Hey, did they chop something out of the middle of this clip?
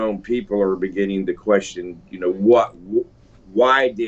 no; 0 cuts

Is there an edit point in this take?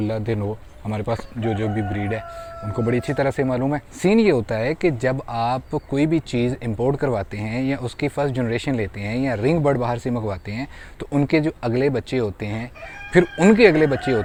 no; 0 cuts

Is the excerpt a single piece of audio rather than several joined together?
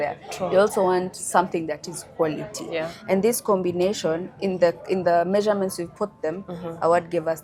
yes; 0 cuts

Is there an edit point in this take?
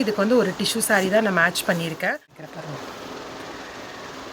yes; 1 cut; at 2.5 s

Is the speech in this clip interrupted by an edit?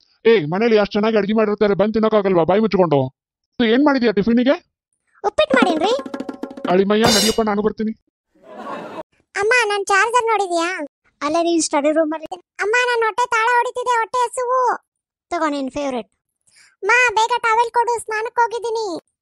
yes; 1 cut; at 9.2 s

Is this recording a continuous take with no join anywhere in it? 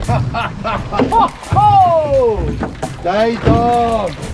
yes; 0 cuts

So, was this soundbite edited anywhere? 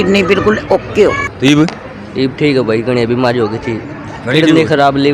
yes; 1 cut; at 1.3 s

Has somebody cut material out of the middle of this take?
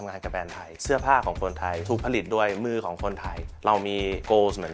no; 0 cuts

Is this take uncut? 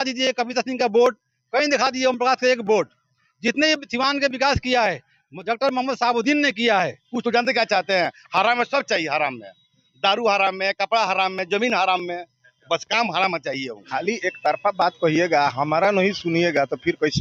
no; 2 cuts; at 7.0 s, 13.9 s

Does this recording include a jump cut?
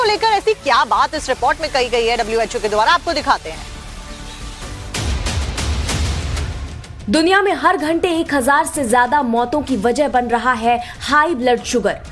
no; 0 cuts

